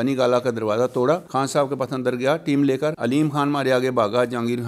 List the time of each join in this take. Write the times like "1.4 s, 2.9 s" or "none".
none